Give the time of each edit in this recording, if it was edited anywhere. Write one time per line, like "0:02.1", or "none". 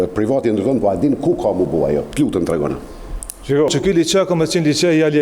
0:03.7